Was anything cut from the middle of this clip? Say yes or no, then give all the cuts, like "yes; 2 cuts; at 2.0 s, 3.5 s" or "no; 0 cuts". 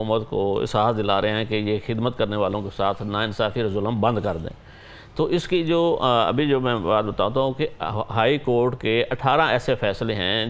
no; 0 cuts